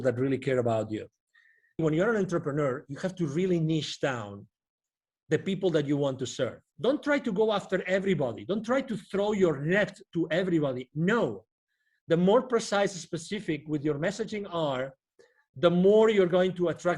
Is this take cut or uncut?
cut